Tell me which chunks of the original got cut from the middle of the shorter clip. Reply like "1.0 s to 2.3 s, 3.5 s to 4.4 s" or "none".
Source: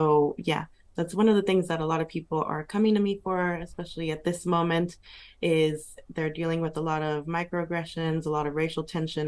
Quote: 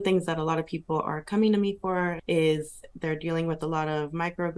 3.6 s to 5.3 s